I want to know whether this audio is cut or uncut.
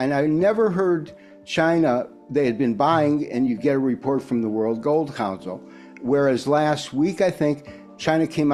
uncut